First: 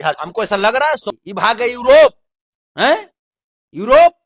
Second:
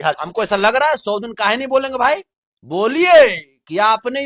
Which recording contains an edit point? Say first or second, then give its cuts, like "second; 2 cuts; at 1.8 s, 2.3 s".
first; 1 cut; at 1.1 s